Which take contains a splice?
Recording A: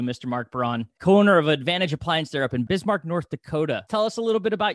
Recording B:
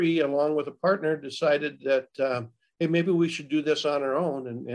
A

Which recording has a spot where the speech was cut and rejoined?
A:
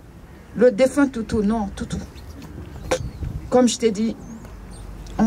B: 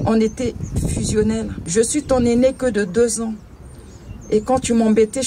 B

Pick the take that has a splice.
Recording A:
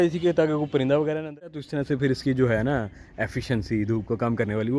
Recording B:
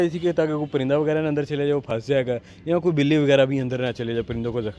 A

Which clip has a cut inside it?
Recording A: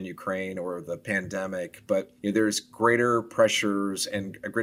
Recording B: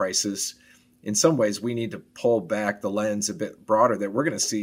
A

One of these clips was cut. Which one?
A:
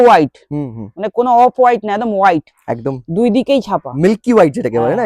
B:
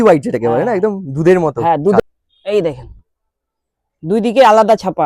B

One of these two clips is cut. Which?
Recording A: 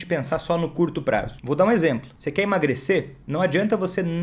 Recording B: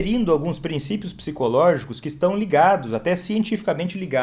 A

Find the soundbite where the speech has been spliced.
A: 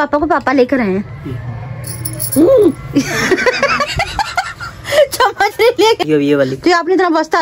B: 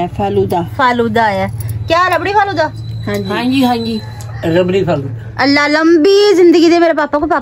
A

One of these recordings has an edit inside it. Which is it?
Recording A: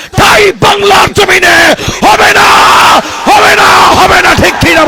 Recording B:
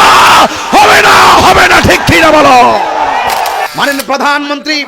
B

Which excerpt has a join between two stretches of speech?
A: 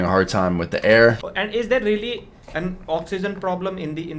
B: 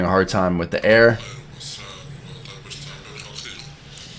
A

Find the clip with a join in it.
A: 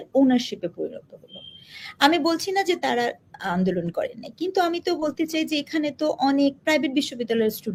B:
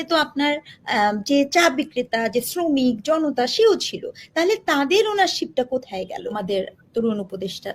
B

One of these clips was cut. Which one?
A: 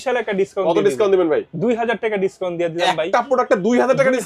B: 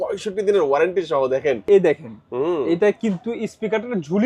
B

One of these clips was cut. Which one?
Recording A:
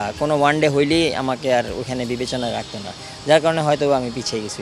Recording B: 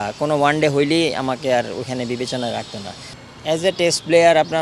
B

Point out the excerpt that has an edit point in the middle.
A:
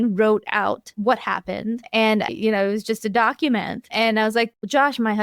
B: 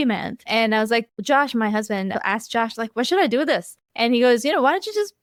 A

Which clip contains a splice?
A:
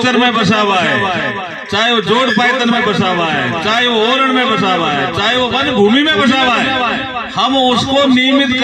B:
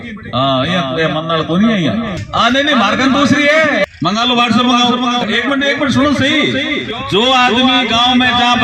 B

